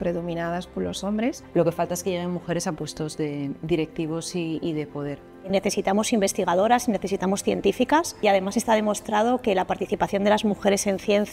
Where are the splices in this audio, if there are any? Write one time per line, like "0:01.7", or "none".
0:01.4
0:05.5
0:08.2